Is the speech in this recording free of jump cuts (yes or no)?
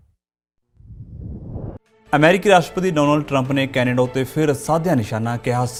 yes